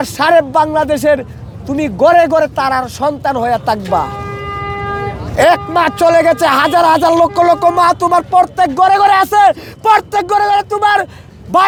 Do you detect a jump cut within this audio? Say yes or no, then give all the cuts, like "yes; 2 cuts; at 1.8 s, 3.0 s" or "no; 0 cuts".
no; 0 cuts